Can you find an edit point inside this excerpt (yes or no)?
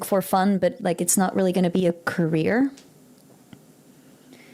no